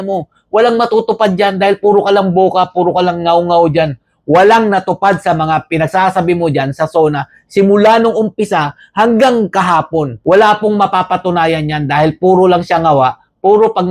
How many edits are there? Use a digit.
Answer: 0